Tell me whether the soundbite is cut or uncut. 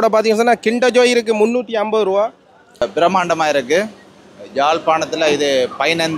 cut